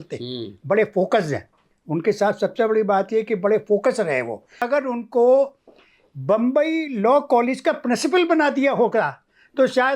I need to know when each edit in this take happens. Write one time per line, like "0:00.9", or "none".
0:04.6

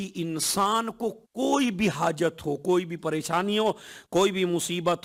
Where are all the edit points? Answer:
none

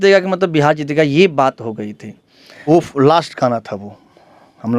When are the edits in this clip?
0:02.7

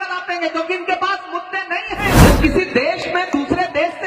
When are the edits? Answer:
0:02.2

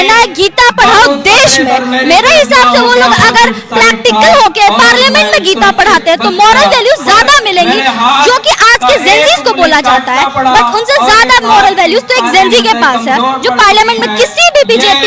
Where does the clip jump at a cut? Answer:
none

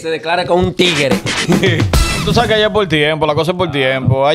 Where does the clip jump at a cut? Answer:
0:02.2

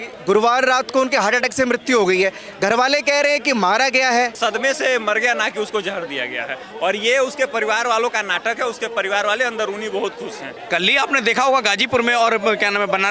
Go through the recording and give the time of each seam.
0:04.4
0:10.6

